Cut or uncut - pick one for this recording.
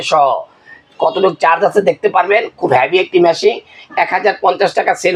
uncut